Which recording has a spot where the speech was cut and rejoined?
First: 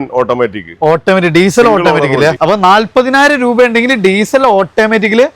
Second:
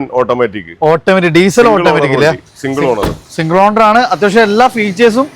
first; 1 cut; at 2.4 s

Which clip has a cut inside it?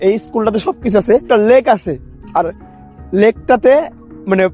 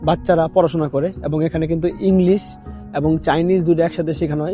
first; 1 cut; at 1.2 s

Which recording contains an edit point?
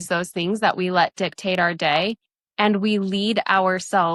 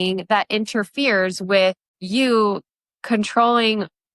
second; 1 cut; at 1.9 s

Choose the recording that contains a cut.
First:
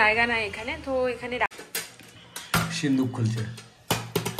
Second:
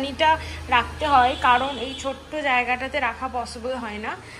first; 1 cut; at 1.6 s

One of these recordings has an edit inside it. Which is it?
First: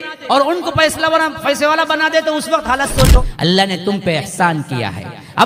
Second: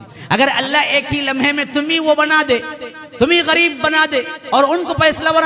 first; 1 cut; at 3.3 s

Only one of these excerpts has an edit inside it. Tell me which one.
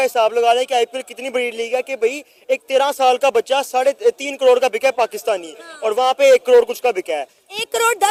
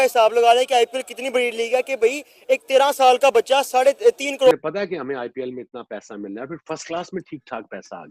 second; 1 cut; at 4.5 s

